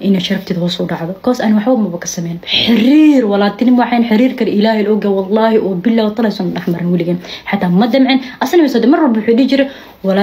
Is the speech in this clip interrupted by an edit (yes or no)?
no